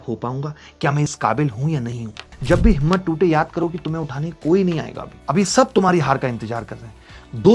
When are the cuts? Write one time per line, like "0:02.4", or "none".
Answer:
0:02.3